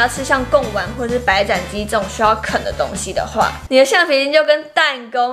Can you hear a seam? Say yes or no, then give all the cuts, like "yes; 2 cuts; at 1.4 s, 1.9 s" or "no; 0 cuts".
yes; 1 cut; at 3.6 s